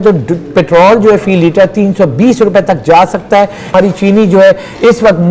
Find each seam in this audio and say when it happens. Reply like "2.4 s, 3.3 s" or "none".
3.7 s

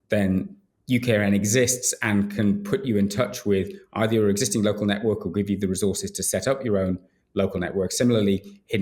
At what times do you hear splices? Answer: none

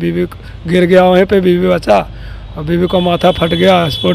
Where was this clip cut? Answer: none

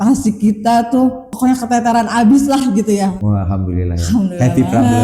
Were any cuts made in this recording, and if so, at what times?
1.2 s, 3.2 s

